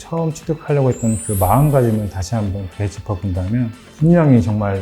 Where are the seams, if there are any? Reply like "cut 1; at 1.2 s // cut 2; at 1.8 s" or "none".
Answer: cut 1; at 3.8 s